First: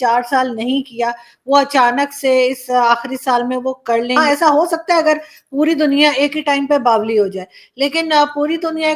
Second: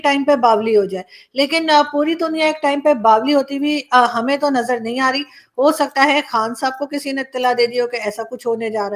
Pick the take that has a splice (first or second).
first